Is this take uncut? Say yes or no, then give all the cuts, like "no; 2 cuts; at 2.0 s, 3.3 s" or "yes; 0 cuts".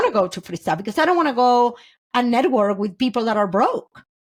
yes; 0 cuts